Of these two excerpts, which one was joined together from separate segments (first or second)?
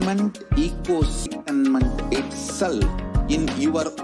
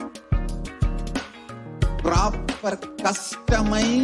first